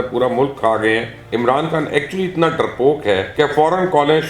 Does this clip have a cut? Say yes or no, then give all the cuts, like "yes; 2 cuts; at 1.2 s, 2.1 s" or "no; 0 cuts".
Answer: yes; 2 cuts; at 1.2 s, 3.3 s